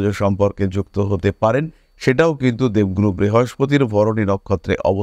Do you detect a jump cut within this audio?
no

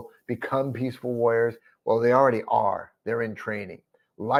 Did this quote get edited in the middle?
no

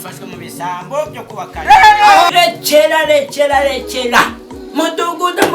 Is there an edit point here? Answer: yes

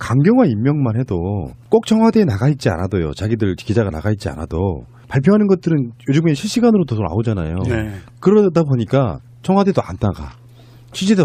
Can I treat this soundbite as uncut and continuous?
yes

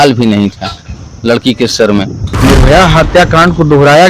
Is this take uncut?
no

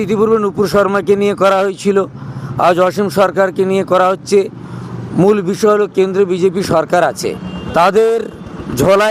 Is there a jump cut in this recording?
yes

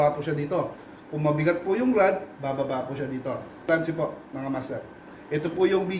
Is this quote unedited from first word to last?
no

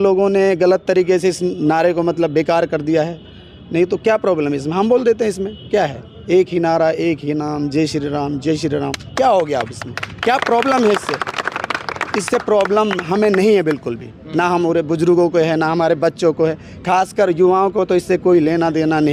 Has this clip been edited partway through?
no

